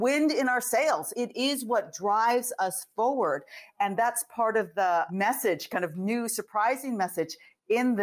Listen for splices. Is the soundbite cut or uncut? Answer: cut